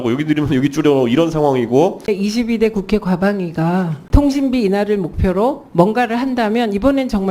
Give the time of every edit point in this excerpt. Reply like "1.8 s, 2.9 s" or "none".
2.1 s, 4.0 s